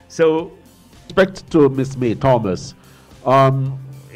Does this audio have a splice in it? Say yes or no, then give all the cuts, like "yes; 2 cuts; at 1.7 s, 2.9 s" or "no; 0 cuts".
yes; 1 cut; at 1.0 s